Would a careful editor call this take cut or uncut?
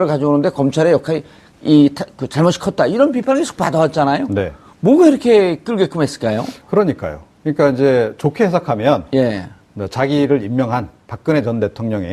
cut